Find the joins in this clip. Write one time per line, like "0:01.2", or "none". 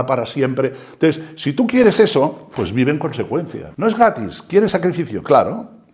0:03.6